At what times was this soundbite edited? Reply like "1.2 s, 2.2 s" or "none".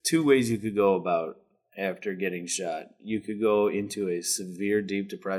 none